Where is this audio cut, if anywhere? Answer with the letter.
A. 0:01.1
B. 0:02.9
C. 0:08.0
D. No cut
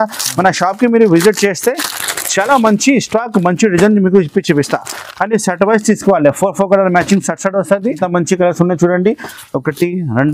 C